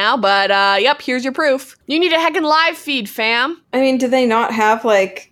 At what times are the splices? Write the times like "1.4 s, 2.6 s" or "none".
1.7 s, 3.6 s